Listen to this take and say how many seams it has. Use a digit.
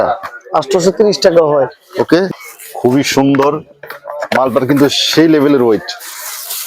1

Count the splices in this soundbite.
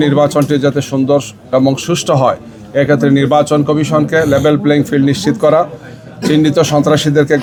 0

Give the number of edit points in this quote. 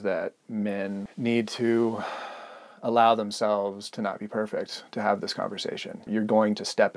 2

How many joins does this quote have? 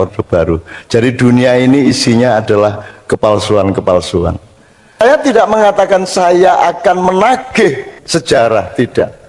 1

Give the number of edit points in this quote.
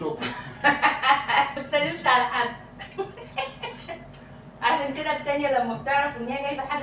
1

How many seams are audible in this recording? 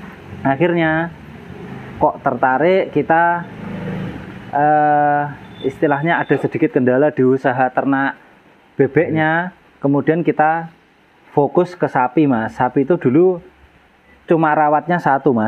0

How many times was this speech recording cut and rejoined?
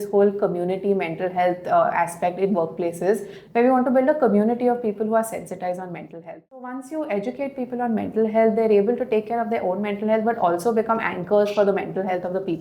1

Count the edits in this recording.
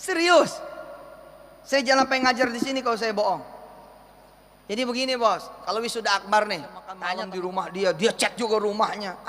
1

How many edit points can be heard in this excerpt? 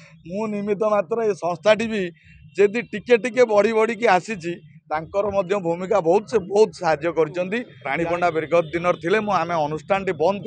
1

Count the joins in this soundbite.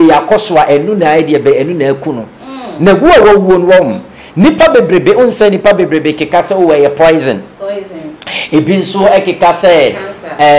0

